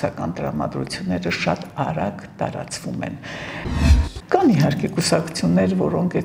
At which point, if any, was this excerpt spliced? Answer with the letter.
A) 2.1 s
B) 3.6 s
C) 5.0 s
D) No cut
B